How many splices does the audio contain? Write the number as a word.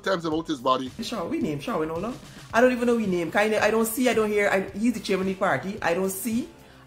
one